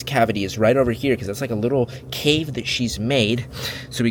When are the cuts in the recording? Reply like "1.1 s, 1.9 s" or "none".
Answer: none

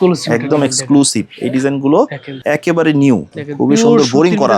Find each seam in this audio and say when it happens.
2.3 s, 3.4 s

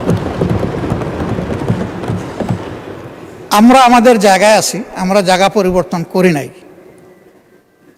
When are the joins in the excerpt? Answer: none

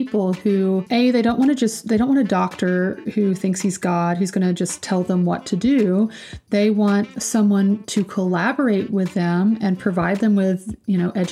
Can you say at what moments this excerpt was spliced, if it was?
0.8 s, 7.1 s

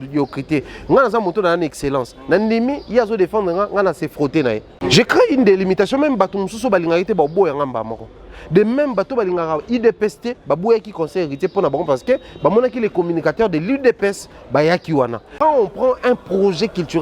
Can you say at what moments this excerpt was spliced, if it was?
4.7 s, 15.3 s

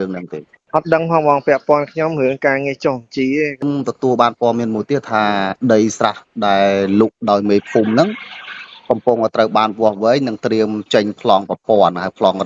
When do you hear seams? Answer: 3.6 s

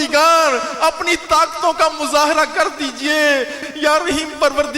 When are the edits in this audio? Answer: 3.6 s

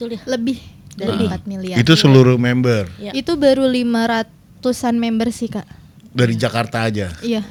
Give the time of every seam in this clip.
none

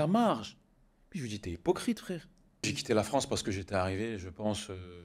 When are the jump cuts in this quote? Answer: 2.8 s

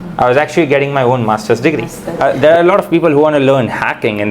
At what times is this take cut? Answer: 2.0 s

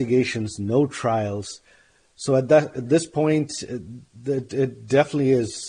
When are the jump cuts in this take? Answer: none

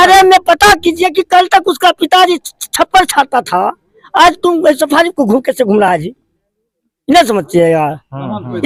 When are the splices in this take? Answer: none

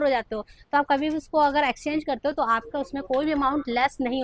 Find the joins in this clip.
none

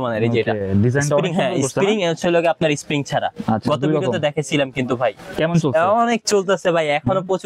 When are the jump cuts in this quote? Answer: none

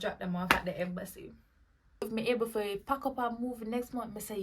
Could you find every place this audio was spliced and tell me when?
2.1 s

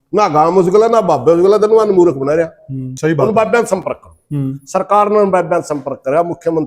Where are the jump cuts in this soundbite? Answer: 2.9 s

